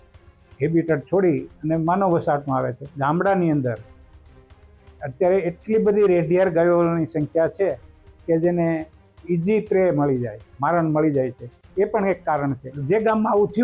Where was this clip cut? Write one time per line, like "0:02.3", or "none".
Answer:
0:02.8
0:12.8